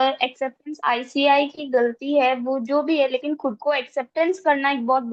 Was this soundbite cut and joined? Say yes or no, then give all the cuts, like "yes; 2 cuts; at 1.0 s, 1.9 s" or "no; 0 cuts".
no; 0 cuts